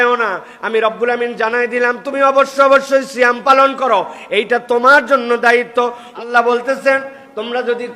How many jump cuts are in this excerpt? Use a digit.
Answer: 1